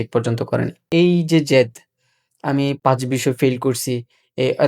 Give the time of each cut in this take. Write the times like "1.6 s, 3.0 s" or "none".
0.8 s, 2.8 s